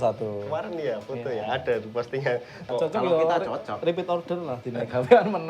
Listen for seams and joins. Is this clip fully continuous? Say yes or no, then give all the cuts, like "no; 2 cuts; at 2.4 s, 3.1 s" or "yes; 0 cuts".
no; 1 cut; at 2.6 s